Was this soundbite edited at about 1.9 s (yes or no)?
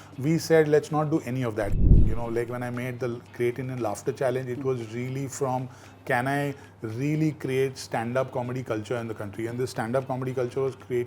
yes